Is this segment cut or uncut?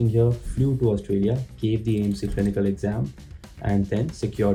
uncut